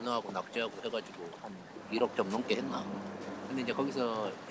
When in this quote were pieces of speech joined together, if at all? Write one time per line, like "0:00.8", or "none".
none